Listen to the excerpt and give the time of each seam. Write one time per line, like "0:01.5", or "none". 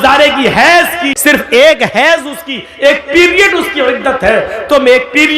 0:01.1